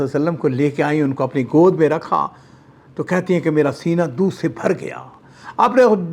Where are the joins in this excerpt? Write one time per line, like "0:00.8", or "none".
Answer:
none